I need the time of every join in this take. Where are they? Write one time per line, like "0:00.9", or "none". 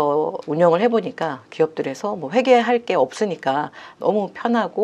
none